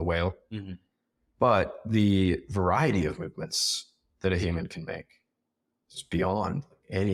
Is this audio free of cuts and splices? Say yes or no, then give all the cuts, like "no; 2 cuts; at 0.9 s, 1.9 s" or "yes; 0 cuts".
yes; 0 cuts